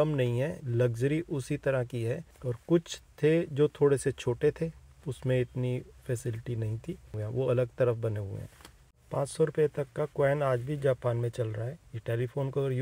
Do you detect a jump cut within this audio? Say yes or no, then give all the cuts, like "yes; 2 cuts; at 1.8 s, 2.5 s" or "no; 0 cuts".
no; 0 cuts